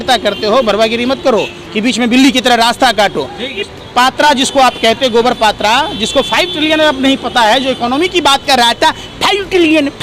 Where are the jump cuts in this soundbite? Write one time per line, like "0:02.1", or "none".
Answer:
0:03.7